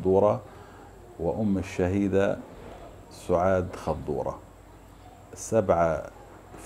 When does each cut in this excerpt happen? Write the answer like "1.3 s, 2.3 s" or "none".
none